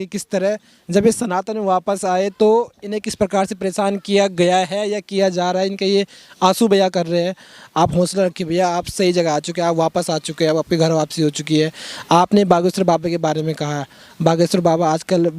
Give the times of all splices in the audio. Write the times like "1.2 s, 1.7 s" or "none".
none